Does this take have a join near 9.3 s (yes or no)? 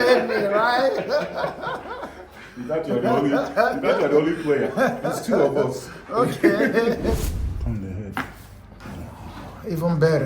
no